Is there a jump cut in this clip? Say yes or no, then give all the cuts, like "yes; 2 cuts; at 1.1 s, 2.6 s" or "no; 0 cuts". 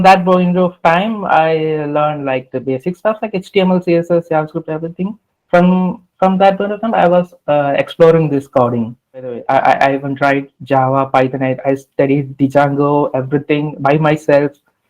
yes; 1 cut; at 9.4 s